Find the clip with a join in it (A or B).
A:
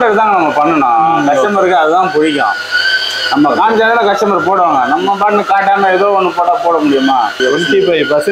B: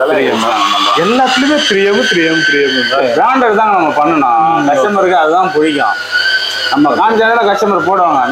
A